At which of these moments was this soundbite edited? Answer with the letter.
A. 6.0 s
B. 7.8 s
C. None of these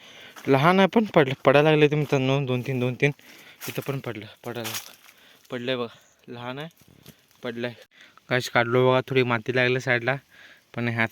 B